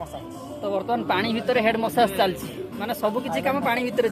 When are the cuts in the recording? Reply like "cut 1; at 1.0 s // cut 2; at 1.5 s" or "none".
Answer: none